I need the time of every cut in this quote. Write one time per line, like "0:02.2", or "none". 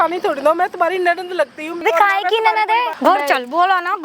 0:01.8
0:02.9